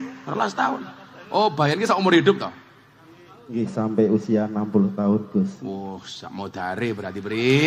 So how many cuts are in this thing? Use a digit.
0